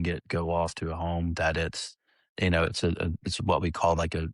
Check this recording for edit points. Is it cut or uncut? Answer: uncut